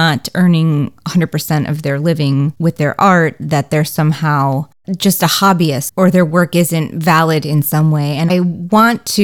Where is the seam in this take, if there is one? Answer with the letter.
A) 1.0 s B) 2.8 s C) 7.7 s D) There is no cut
D